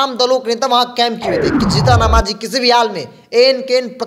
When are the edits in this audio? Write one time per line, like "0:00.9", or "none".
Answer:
0:01.6